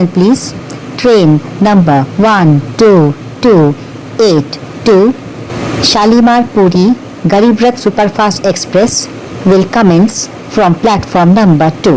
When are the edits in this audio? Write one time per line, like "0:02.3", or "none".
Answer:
none

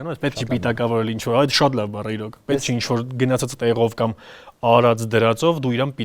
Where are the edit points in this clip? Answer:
none

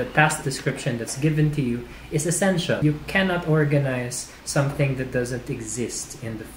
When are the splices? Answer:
0:02.8

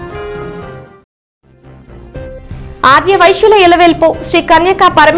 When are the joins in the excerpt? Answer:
none

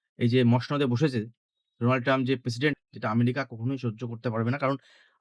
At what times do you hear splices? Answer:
0:02.8

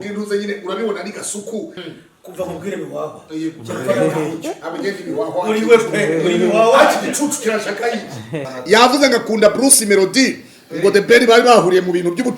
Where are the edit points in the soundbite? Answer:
0:01.8
0:08.4

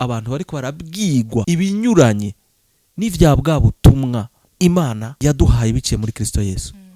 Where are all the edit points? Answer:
0:01.4
0:04.4
0:05.1

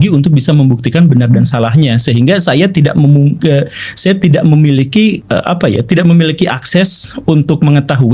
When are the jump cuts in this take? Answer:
0:05.2

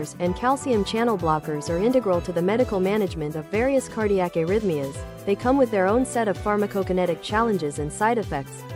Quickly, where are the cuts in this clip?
none

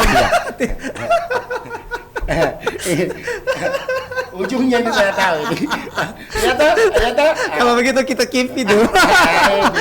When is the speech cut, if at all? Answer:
none

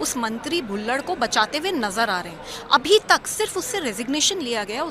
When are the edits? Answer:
none

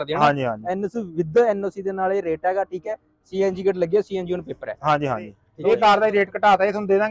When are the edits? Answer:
0:05.4

